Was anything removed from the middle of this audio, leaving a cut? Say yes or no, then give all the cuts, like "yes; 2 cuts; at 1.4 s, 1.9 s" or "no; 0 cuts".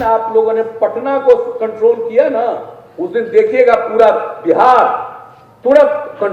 no; 0 cuts